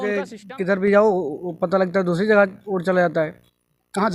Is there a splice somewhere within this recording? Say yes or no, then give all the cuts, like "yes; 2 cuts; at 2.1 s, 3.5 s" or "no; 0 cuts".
no; 0 cuts